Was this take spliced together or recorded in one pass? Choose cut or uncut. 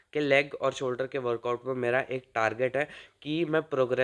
uncut